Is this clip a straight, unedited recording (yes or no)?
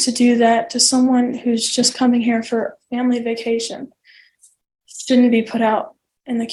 yes